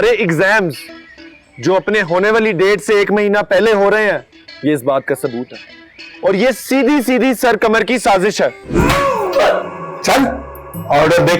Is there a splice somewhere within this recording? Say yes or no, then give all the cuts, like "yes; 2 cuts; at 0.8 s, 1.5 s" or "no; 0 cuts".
yes; 1 cut; at 8.7 s